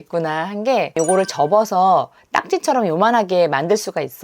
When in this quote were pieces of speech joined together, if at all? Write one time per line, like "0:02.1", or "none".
0:00.9